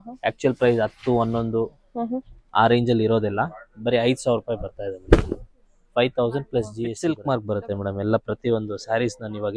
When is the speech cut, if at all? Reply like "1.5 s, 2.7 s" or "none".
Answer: 7.0 s

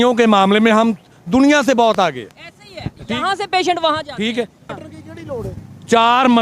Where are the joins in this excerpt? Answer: 4.7 s

